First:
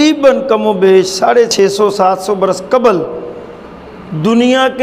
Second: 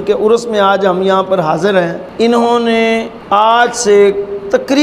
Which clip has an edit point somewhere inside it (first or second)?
second